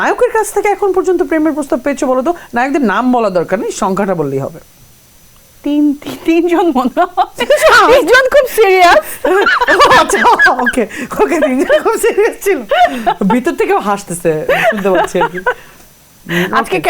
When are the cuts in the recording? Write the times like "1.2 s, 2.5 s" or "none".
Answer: none